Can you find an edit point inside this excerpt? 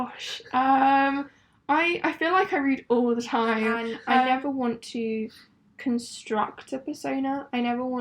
yes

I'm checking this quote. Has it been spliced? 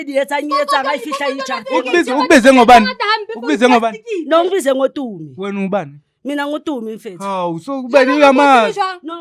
no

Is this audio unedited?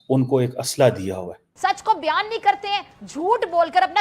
no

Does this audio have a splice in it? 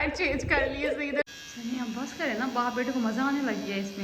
yes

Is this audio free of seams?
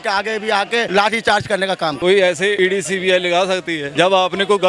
no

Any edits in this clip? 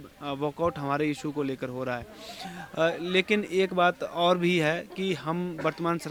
no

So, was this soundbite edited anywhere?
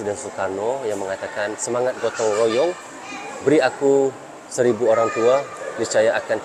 no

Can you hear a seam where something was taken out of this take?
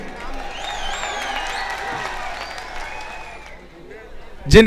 yes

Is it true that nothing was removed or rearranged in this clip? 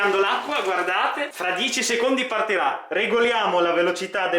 no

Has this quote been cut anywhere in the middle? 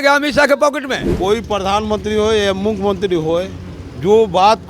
yes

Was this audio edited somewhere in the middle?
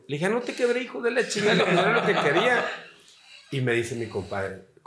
no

